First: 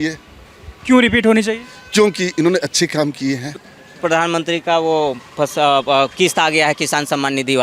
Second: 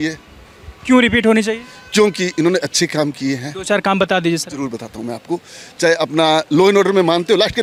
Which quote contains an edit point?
first; 1 cut; at 3.6 s

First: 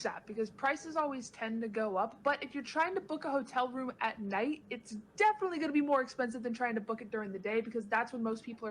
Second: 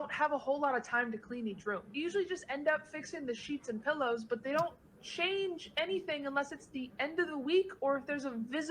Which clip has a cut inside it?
first; 1 cut; at 7.7 s

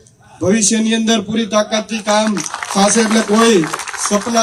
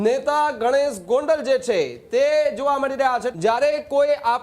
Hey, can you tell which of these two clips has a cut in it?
second; 1 cut; at 3.3 s

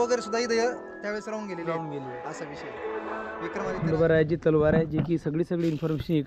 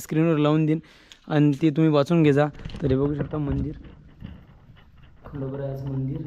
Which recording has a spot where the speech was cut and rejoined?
first; 1 cut; at 3.8 s

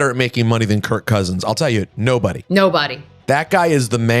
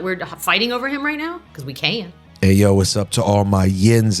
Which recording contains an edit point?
second; 1 cut; at 2.2 s

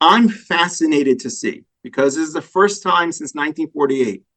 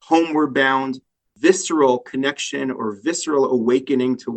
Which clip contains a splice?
second; 1 cut; at 1.2 s

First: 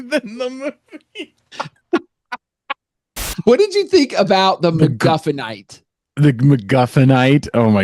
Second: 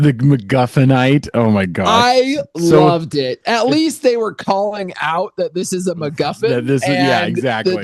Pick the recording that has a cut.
first; 1 cut; at 3.3 s

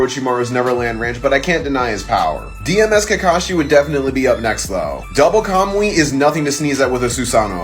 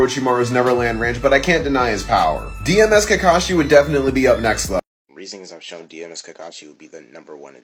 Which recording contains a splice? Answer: first; 1 cut; at 4.9 s

